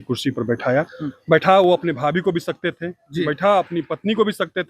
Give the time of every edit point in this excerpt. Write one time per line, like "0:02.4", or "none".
none